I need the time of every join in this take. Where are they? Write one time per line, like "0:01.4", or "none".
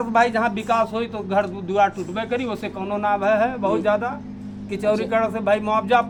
none